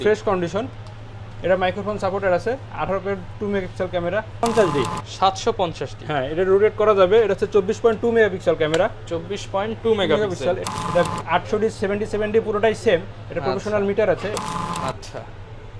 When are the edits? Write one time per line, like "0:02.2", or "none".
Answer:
0:04.4
0:10.6
0:14.4